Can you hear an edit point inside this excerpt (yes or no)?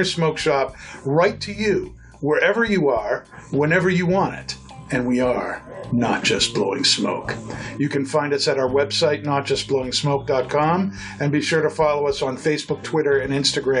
no